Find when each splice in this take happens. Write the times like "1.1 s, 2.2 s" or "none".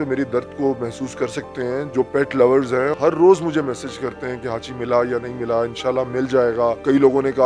none